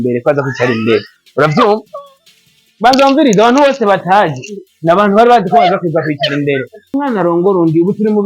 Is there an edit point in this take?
yes; 1 cut; at 7.0 s

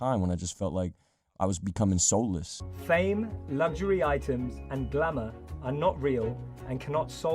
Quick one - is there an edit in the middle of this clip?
yes; 1 cut; at 2.5 s

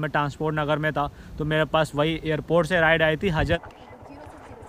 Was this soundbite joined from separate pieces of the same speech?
yes; 1 cut; at 3.6 s

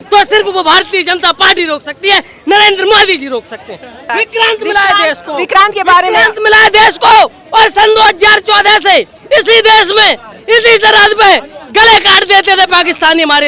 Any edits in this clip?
yes; 1 cut; at 4.1 s

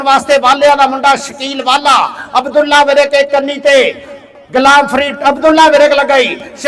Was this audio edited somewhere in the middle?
no; 0 cuts

